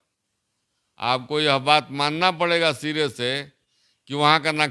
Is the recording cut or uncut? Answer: uncut